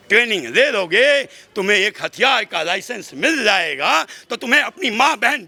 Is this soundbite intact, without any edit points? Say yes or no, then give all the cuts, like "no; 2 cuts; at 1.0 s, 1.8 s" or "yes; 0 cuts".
yes; 0 cuts